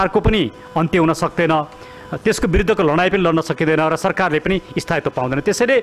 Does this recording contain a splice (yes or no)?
no